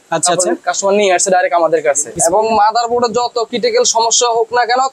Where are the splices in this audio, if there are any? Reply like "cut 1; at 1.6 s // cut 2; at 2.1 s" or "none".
cut 1; at 2.2 s